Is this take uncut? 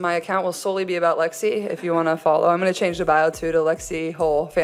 yes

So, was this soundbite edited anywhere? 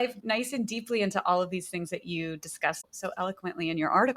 yes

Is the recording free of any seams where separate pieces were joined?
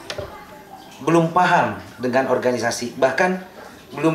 yes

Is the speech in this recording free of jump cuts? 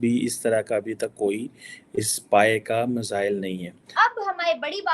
no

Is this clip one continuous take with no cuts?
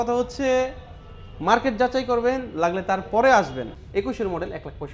no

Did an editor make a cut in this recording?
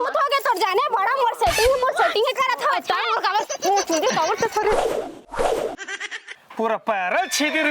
yes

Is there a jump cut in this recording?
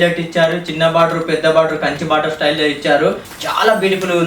yes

